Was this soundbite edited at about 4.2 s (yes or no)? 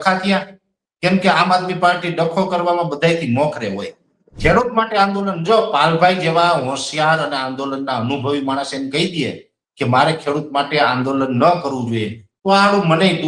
yes